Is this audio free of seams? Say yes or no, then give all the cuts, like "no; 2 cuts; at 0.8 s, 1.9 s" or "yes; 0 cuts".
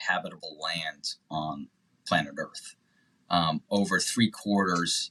yes; 0 cuts